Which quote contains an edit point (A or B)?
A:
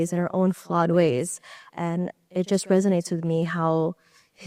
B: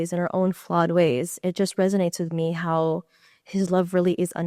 B